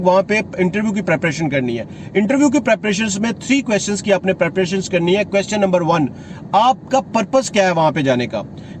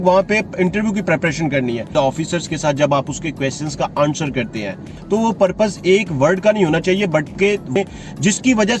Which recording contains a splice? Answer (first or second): second